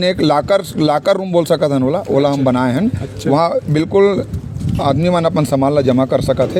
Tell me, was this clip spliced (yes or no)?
no